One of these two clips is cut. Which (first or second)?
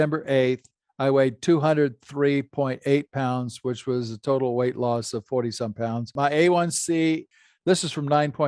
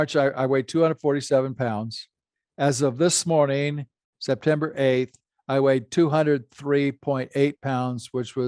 first